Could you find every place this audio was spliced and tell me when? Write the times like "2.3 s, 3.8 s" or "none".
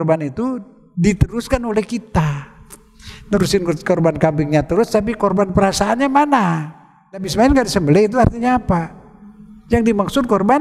7.3 s